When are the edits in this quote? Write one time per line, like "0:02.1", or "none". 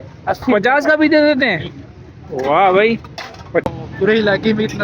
0:03.7